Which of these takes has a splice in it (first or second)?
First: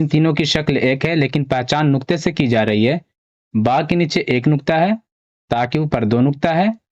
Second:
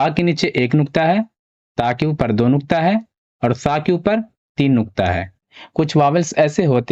second